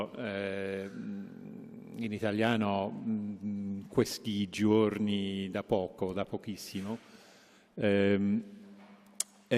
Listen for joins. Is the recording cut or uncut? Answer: uncut